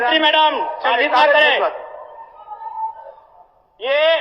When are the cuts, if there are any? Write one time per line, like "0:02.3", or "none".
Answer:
none